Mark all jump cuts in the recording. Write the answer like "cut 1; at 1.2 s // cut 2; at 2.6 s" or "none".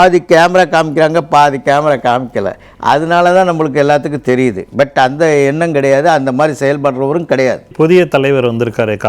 cut 1; at 7.7 s